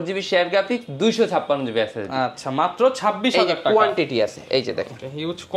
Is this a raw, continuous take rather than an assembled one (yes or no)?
yes